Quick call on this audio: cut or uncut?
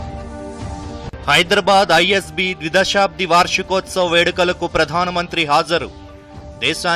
uncut